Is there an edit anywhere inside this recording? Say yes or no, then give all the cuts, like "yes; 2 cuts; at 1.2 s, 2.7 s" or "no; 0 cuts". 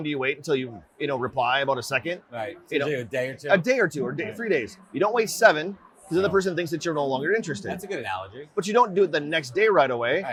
no; 0 cuts